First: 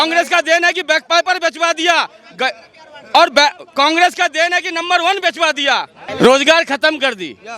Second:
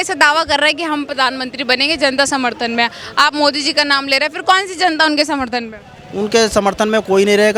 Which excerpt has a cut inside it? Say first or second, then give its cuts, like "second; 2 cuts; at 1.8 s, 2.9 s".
first; 1 cut; at 6.0 s